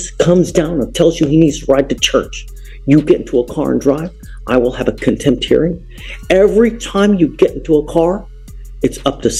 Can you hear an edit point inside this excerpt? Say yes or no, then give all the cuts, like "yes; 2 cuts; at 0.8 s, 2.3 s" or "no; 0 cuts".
no; 0 cuts